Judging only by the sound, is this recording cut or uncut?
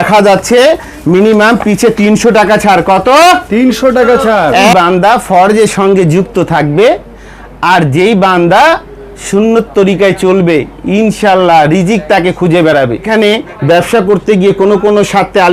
cut